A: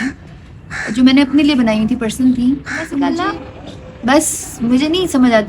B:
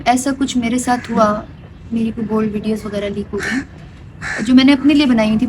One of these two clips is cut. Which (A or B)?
A